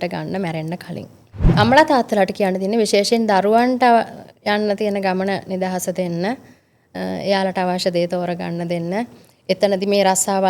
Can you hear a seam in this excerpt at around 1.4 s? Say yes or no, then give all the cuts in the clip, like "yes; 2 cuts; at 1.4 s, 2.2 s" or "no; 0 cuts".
yes; 1 cut; at 1.4 s